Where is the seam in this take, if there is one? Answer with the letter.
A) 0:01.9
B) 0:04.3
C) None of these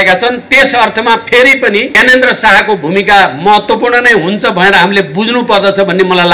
A